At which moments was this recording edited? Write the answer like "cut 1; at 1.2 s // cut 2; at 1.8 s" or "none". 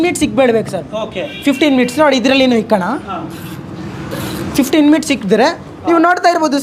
none